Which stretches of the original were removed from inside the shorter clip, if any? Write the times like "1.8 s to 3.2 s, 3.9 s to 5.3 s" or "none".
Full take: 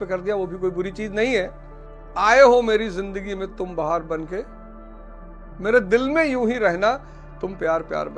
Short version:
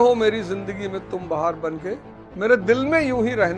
4.6 s to 5.4 s